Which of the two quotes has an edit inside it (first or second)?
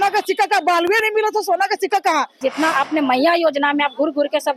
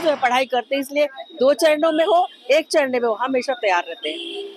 first